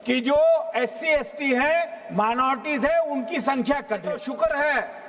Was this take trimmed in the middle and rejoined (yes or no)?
yes